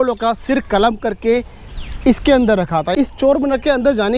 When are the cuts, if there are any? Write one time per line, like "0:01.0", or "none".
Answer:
0:02.9

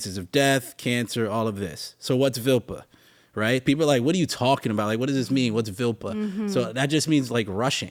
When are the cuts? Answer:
none

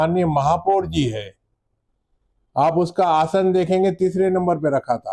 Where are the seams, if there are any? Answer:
none

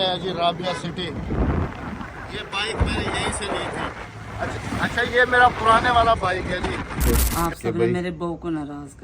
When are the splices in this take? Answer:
0:07.2

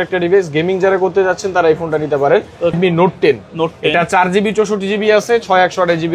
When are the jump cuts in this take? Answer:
0:02.8

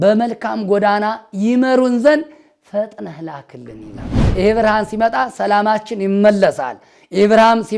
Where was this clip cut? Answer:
0:04.2

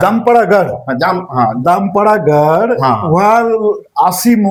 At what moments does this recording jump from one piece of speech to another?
none

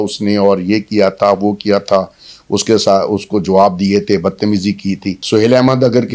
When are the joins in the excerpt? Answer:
0:05.1

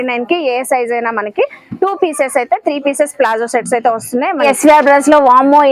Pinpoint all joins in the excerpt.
0:04.5

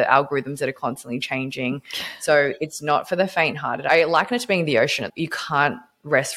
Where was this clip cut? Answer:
0:03.8
0:05.1

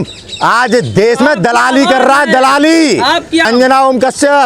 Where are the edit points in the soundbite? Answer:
0:03.5

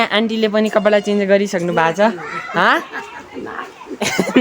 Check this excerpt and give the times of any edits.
none

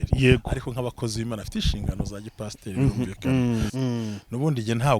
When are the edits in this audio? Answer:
0:03.7

